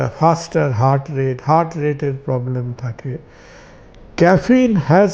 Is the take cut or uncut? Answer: uncut